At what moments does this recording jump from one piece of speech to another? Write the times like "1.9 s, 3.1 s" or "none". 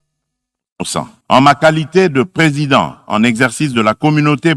1.2 s